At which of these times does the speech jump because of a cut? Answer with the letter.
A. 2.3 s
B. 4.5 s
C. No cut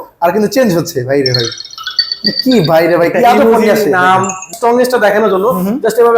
B